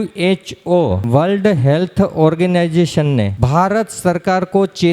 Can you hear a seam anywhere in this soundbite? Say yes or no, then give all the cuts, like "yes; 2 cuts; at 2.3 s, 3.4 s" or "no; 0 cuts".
yes; 2 cuts; at 1.0 s, 3.4 s